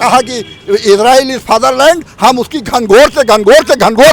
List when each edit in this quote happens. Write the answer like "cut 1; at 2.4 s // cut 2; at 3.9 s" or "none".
none